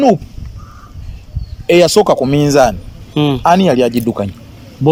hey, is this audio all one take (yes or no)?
yes